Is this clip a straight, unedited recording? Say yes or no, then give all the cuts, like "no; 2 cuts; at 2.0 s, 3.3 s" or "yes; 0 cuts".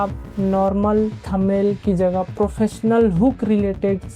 yes; 0 cuts